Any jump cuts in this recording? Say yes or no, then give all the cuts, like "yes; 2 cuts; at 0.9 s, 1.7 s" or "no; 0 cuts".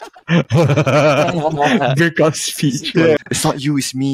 yes; 1 cut; at 3.2 s